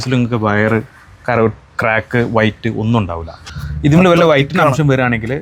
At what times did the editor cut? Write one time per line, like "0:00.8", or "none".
0:03.4